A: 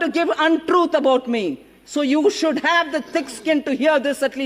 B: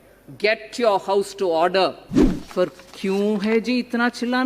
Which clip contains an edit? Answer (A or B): B